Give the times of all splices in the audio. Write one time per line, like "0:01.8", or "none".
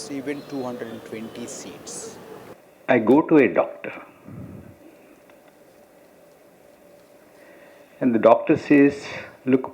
0:02.5